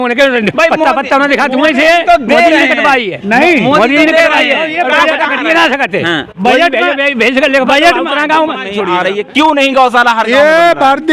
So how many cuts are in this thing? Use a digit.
1